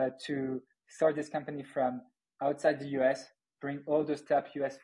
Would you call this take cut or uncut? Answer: uncut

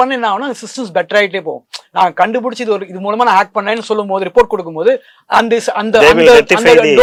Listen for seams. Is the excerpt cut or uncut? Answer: uncut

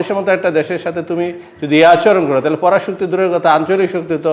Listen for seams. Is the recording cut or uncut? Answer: uncut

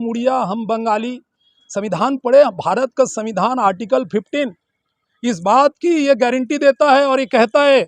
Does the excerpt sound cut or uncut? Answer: uncut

